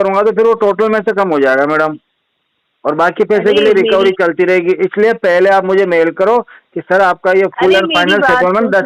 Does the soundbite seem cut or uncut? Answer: uncut